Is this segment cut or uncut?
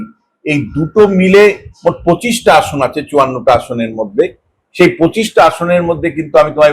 uncut